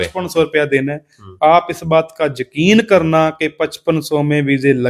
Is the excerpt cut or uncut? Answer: uncut